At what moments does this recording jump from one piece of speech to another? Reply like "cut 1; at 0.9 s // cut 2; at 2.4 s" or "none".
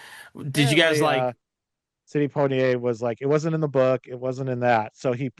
cut 1; at 1.0 s